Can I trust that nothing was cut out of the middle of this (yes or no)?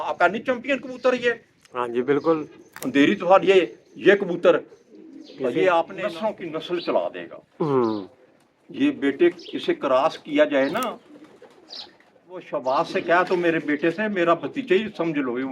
no